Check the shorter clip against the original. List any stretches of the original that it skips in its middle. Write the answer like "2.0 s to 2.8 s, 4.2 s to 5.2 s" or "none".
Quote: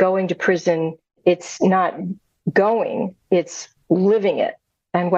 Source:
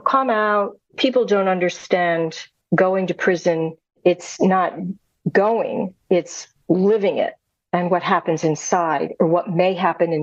none